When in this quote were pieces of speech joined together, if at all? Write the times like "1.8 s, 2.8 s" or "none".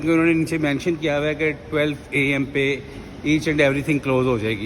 none